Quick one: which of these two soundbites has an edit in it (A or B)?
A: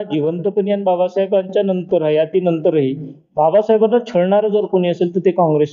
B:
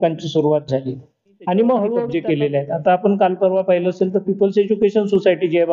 B